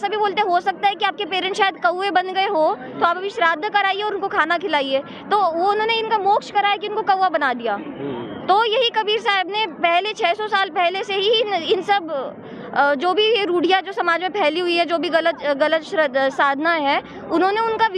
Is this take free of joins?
yes; 0 cuts

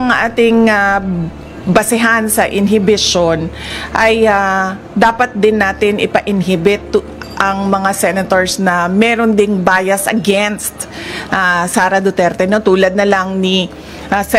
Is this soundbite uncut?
yes; 0 cuts

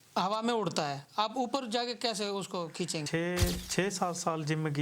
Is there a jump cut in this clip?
yes; 1 cut; at 3.0 s

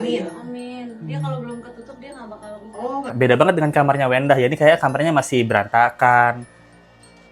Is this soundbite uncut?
no; 1 cut; at 3.1 s

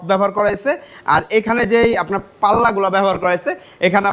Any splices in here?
no; 0 cuts

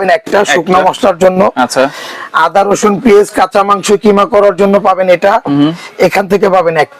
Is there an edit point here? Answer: no; 0 cuts

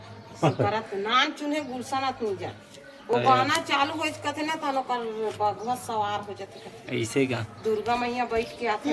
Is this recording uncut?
yes; 0 cuts

